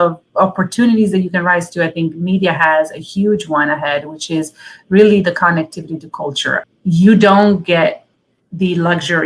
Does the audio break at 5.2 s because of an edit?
no; 1 cut; at 6.6 s

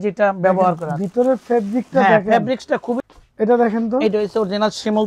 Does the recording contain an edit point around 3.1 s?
yes; 1 cut; at 3.1 s

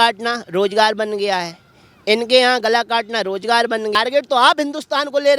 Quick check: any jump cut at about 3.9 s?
yes; 1 cut; at 3.9 s

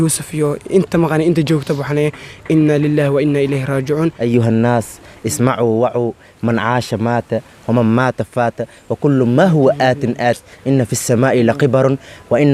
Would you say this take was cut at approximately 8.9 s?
no; 1 cut; at 4.2 s

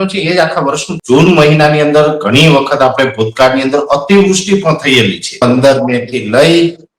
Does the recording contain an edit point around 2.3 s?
no; 2 cuts; at 0.9 s, 5.4 s

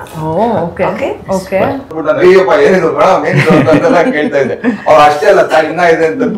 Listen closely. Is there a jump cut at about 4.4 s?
no; 1 cut; at 1.9 s

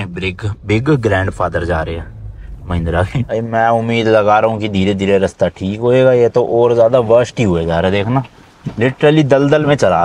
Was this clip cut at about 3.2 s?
yes; 1 cut; at 3.2 s

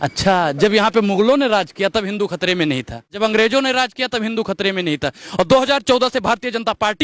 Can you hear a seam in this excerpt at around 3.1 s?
yes; 1 cut; at 3.1 s

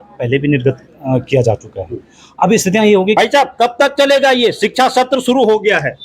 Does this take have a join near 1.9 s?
no; 1 cut; at 3.2 s

